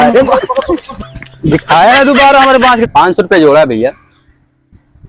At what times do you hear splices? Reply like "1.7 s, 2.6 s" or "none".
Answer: 2.9 s